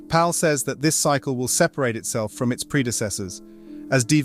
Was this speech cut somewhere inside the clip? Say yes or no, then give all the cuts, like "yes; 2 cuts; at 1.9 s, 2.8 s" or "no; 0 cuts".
no; 0 cuts